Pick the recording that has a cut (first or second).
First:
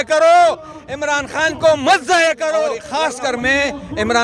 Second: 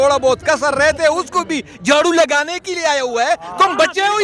first